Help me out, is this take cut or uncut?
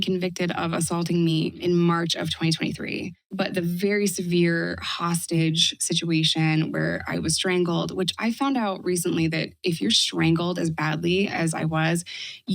cut